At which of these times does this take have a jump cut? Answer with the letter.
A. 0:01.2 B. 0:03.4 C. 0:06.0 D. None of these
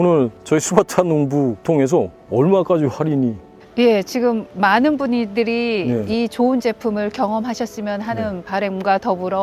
C